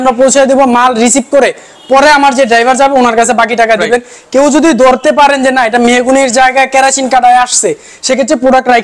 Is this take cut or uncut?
uncut